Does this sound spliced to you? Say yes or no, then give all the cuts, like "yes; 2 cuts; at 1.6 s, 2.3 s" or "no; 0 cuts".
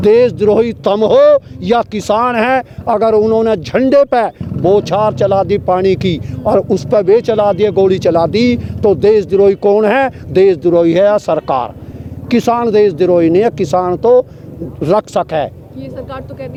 no; 0 cuts